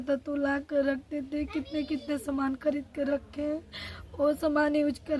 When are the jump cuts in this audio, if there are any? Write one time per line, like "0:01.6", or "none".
none

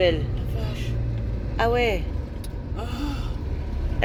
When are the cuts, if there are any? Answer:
none

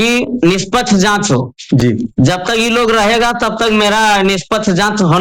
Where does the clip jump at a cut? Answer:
none

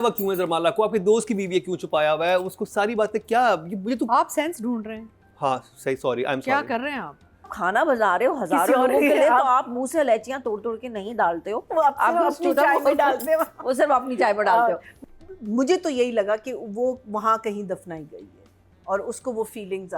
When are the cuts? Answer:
0:07.5
0:14.9

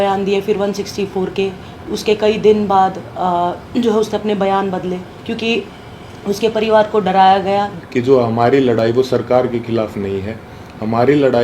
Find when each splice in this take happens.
0:07.8

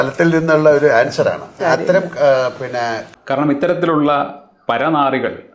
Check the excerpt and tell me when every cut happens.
0:03.1

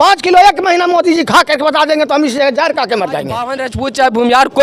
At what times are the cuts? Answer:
0:03.6

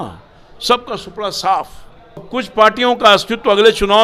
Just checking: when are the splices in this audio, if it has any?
0:02.3

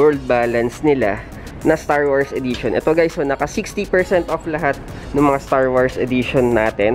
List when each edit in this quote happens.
none

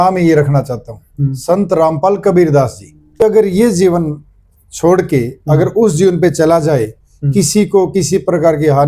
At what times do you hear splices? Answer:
0:03.2

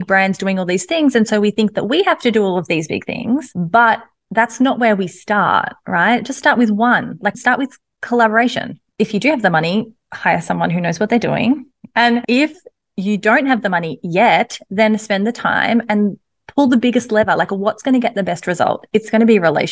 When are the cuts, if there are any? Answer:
0:03.5
0:08.9
0:12.0

